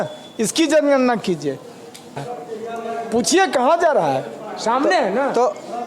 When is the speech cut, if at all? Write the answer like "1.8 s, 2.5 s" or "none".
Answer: 2.2 s